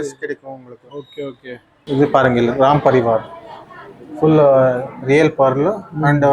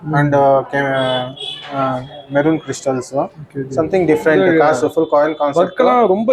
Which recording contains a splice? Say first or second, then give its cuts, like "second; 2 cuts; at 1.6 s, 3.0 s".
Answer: first; 1 cut; at 1.8 s